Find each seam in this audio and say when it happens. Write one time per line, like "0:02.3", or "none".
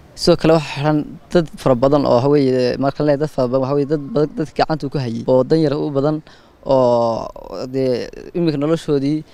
0:05.2

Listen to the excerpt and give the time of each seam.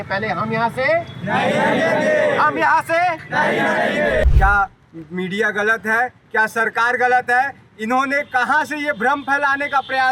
0:04.3

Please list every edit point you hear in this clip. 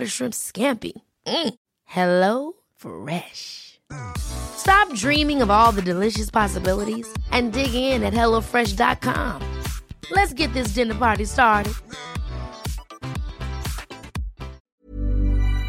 0:14.7

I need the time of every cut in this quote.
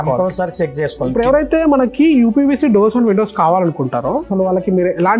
0:01.1
0:04.3

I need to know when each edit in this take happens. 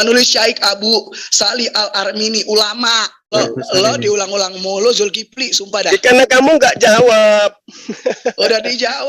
0:03.3

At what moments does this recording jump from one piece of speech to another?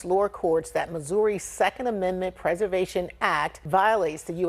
none

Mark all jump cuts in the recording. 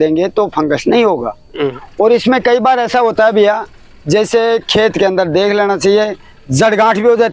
0:01.7

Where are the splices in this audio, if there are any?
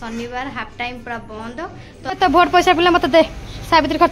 0:02.0

